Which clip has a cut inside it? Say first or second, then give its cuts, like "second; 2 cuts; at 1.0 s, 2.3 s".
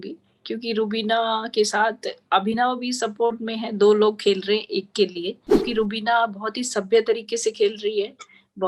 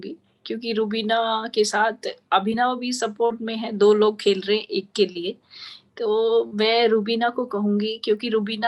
first; 1 cut; at 5.7 s